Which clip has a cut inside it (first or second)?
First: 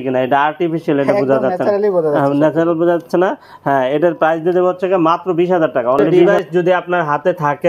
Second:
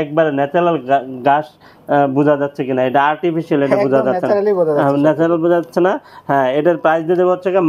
first